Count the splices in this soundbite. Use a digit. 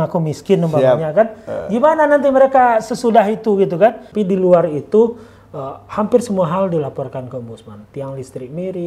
1